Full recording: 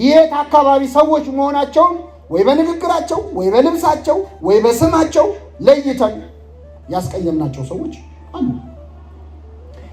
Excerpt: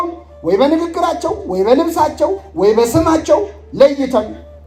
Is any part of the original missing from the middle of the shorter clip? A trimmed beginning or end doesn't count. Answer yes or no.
no